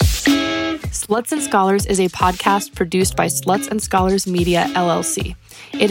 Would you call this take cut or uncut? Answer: cut